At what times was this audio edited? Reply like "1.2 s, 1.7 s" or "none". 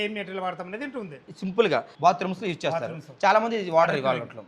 1.9 s